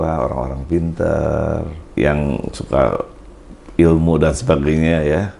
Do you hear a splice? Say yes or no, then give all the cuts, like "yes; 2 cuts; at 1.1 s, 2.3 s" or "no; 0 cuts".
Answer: yes; 1 cut; at 1.8 s